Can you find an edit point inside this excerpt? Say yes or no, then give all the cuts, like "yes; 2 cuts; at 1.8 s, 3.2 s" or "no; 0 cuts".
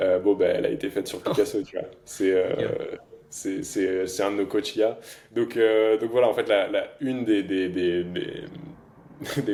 no; 0 cuts